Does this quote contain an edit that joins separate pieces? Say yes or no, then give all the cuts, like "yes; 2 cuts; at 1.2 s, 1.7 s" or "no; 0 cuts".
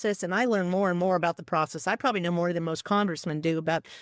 no; 0 cuts